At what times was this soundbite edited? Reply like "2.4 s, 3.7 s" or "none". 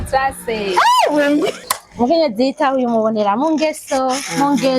1.6 s